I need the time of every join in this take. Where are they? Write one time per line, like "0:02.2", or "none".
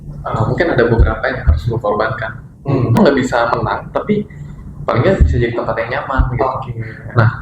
0:03.0

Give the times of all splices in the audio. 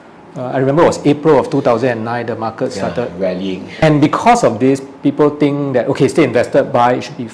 0:03.8

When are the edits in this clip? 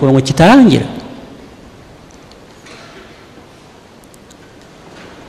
none

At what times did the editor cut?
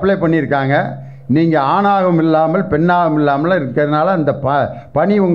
none

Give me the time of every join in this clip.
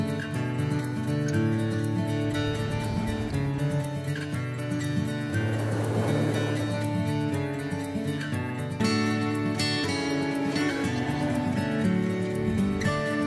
none

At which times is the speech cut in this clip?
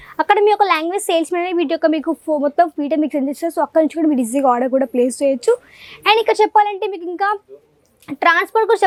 none

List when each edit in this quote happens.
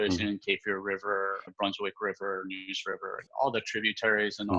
0:01.5
0:03.3

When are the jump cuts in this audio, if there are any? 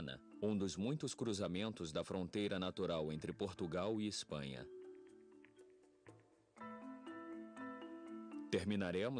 0:07.0

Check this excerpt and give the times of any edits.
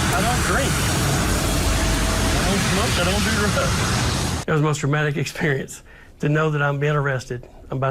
0:04.4

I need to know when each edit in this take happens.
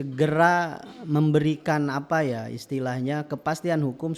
none

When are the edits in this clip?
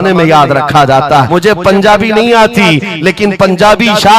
0:01.3

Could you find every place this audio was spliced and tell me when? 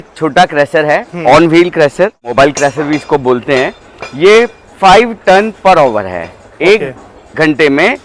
0:02.3

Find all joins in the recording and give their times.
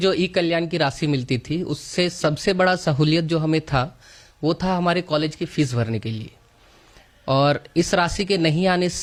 none

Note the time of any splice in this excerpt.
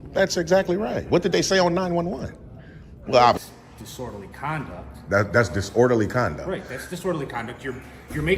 0:03.4

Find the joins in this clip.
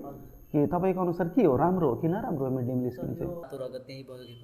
0:03.4

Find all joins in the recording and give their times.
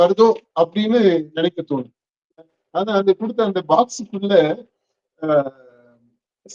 0:02.6

